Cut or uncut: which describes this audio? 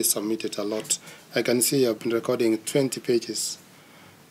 uncut